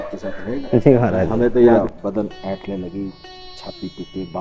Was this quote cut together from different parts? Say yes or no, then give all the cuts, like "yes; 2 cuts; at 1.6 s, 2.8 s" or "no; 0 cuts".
yes; 1 cut; at 1.7 s